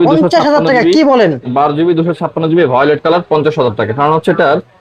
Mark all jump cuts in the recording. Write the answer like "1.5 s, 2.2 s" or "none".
none